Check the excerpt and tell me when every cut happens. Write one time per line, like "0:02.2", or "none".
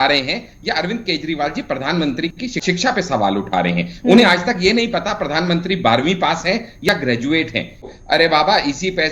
0:02.6
0:07.9